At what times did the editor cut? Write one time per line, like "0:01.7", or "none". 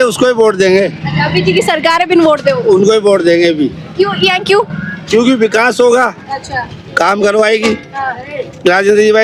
none